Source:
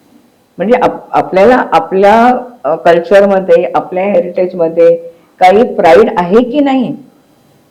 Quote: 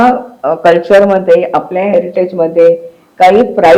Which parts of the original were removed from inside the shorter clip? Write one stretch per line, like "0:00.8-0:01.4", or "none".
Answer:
none